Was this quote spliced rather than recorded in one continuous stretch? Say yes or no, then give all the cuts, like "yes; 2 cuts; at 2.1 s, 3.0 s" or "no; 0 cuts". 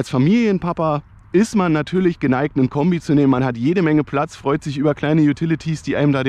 no; 0 cuts